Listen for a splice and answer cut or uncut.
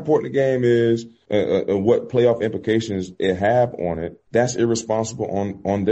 cut